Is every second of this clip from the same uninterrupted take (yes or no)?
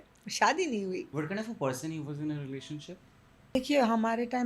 no